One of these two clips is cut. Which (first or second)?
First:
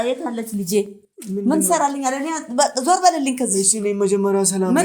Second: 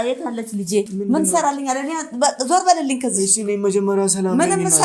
second